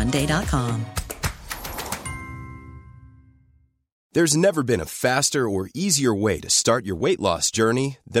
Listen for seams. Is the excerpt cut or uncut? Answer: cut